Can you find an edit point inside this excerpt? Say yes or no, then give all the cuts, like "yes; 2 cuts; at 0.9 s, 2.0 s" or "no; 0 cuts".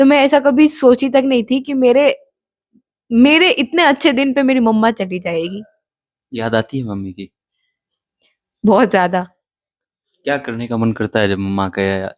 no; 0 cuts